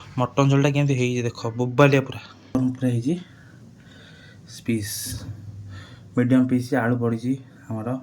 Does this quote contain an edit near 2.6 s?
yes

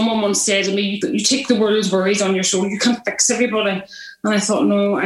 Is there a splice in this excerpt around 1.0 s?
yes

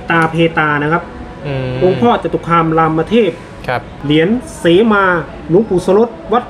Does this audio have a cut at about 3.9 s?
yes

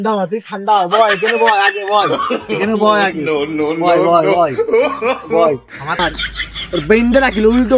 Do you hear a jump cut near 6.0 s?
yes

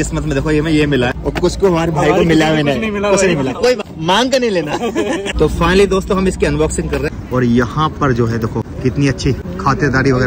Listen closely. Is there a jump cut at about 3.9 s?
yes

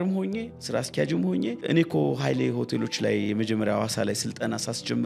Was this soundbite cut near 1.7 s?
yes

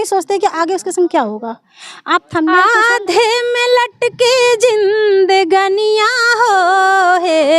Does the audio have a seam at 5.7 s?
no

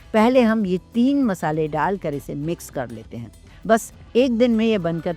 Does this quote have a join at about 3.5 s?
yes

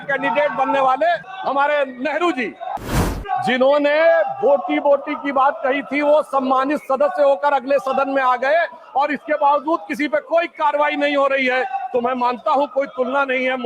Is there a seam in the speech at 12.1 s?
no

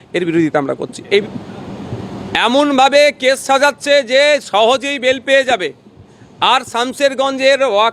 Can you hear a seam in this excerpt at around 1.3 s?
yes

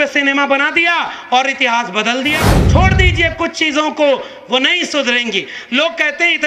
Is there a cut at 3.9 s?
no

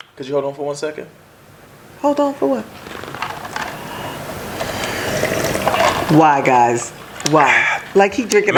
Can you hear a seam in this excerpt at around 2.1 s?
no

